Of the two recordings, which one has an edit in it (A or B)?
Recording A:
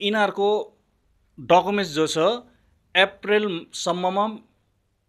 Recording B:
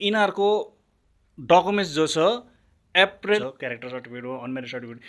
B